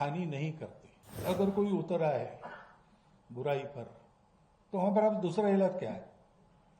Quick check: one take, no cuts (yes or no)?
no